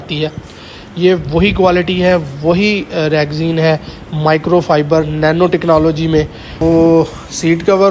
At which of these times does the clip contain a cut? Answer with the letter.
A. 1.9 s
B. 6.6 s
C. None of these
B